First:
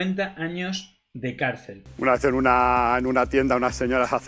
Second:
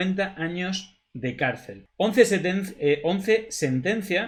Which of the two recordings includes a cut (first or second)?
first